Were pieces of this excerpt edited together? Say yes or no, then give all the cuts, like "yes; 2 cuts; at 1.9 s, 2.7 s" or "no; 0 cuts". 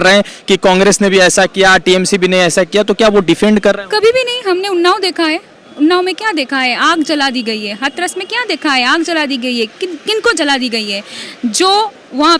no; 0 cuts